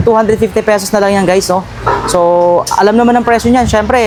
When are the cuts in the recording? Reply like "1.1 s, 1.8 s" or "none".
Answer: none